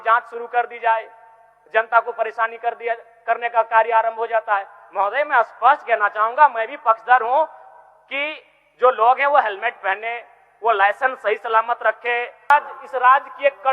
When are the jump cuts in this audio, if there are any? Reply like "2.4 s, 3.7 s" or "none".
12.5 s